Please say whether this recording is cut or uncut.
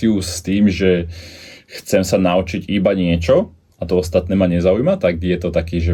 uncut